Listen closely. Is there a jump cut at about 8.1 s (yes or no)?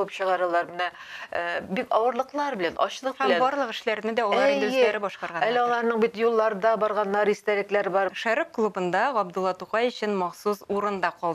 yes